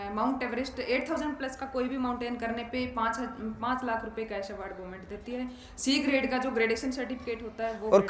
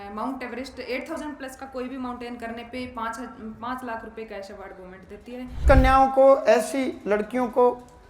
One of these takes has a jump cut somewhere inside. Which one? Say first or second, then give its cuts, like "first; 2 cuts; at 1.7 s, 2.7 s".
second; 1 cut; at 5.6 s